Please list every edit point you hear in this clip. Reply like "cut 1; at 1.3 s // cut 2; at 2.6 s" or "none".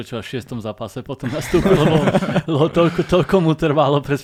none

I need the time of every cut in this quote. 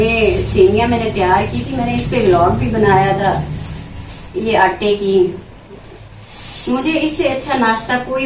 none

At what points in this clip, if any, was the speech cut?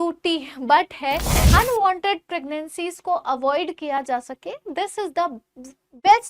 cut 1; at 1.3 s

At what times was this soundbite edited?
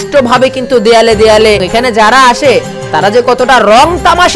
cut 1; at 1.7 s

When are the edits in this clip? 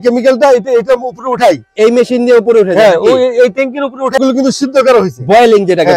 cut 1; at 4.2 s

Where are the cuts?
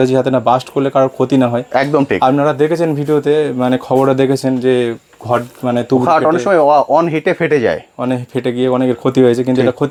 none

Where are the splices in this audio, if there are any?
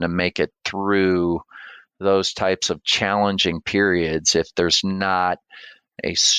none

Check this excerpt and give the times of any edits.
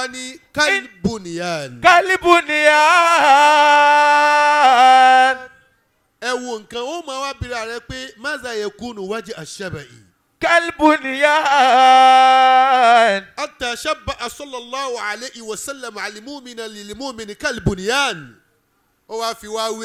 none

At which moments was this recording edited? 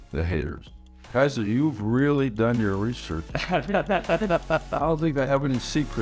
cut 1; at 1.0 s

